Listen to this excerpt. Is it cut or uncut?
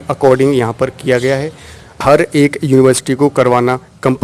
cut